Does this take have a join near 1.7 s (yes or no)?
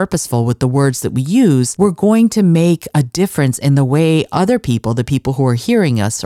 yes